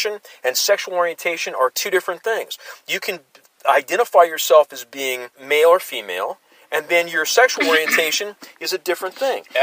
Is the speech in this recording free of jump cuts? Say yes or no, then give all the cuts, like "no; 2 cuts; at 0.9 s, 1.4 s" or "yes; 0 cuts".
no; 1 cut; at 5.4 s